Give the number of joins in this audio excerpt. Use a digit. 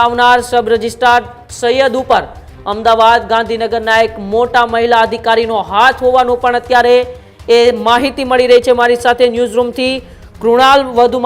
0